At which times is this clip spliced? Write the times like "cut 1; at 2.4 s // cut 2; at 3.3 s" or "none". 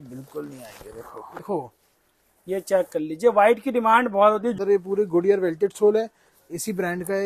cut 1; at 1.4 s // cut 2; at 4.5 s